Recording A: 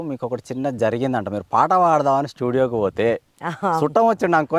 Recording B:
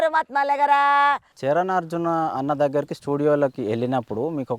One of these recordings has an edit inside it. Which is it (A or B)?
B